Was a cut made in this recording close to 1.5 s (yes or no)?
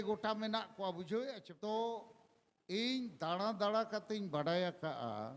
yes